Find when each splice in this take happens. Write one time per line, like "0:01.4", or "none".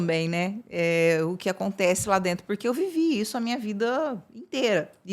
none

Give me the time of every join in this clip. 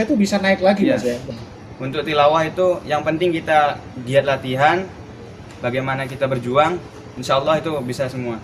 0:01.2
0:05.4

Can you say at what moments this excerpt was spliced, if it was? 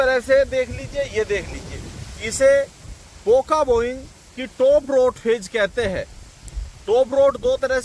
none

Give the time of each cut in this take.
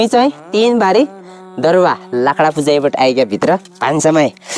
none

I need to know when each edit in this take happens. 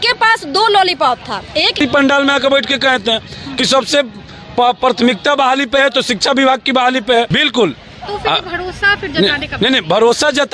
0:01.8
0:07.3

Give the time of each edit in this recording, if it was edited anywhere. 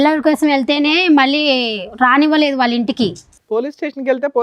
none

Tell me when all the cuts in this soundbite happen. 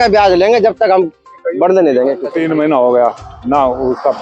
0:02.3

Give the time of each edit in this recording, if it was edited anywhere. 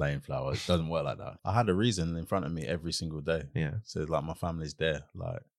0:01.3

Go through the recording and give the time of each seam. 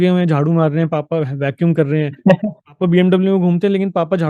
none

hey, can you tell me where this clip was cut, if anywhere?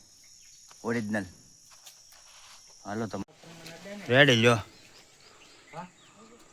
0:03.2

